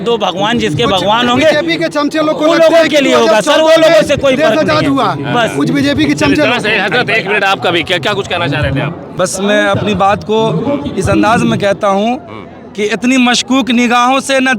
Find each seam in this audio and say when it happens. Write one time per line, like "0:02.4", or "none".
0:09.0